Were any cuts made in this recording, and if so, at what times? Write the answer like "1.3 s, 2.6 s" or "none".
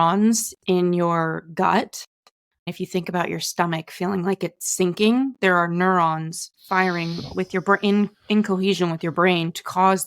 2.7 s

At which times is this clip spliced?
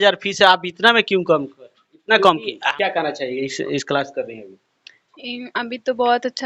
2.6 s

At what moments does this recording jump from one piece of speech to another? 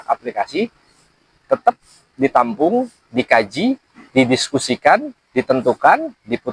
3.9 s, 5.2 s

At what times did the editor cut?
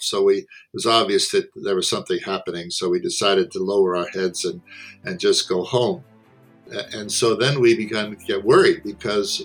6.6 s

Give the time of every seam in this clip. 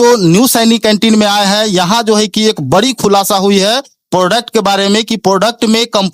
none

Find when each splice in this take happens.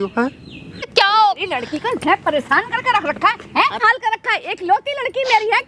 0.9 s, 3.8 s

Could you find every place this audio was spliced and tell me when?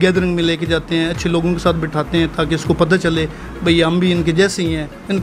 none

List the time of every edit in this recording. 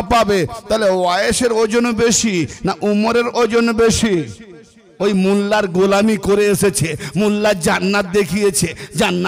4.9 s

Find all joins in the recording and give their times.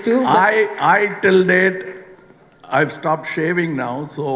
none

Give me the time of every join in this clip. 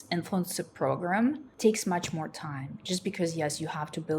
1.5 s

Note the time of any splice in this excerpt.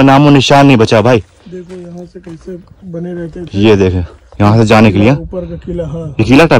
none

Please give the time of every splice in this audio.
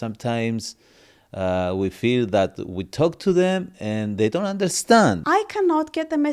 5.2 s

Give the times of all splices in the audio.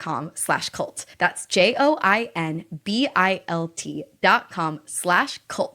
1.0 s

